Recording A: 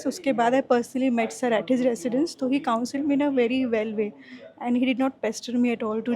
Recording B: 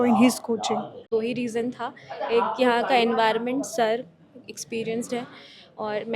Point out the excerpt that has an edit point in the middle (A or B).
B